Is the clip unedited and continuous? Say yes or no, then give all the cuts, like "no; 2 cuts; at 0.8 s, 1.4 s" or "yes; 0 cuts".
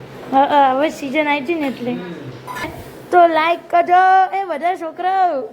no; 1 cut; at 2.6 s